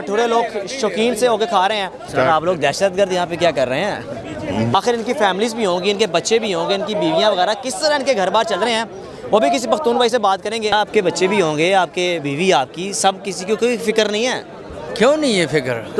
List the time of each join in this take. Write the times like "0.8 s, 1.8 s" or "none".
2.0 s, 4.7 s, 10.7 s